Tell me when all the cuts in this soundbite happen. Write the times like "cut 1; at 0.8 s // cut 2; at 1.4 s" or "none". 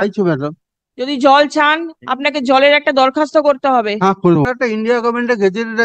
cut 1; at 4.4 s